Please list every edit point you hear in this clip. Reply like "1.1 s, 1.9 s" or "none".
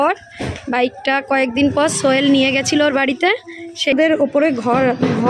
3.9 s